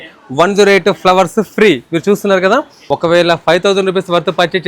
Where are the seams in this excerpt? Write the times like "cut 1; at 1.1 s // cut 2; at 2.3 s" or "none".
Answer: cut 1; at 2.8 s